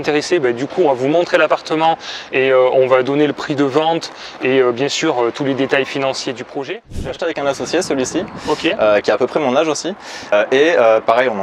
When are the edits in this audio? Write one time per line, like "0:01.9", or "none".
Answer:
0:07.1
0:10.3

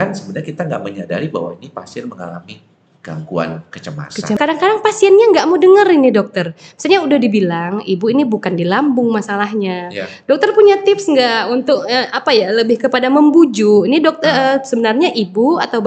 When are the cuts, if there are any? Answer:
0:04.4

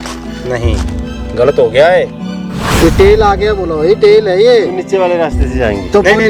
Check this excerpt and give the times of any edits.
none

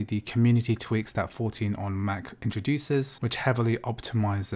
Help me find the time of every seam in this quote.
0:03.2

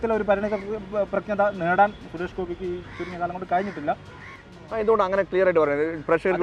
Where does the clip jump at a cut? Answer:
none

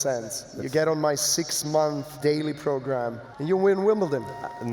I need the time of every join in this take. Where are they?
0:02.1
0:03.3

